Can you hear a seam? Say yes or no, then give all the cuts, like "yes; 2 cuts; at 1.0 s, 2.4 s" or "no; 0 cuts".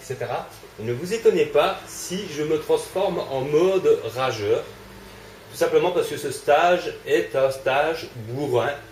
no; 0 cuts